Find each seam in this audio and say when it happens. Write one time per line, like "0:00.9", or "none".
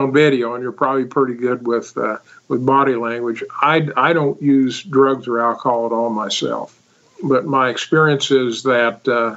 0:07.0